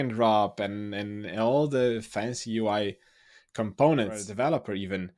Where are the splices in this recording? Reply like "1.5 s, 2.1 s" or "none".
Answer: 4.3 s